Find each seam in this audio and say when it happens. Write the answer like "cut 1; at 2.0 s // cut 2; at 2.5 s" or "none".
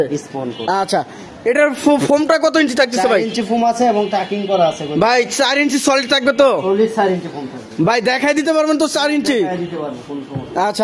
none